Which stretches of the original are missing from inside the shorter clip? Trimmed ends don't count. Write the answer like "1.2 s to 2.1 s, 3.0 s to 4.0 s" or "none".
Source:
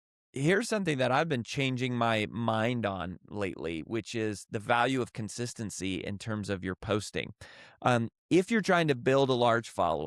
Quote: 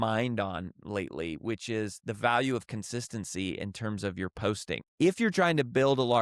7.3 s to 8.2 s